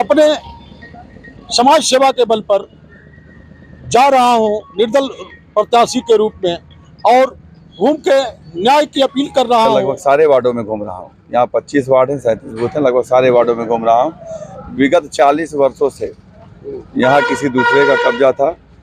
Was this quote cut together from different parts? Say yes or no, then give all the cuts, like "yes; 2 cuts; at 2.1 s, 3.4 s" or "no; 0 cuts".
yes; 1 cut; at 9.9 s